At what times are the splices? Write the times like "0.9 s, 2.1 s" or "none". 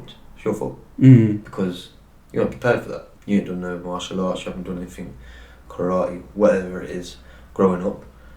1.5 s, 3.1 s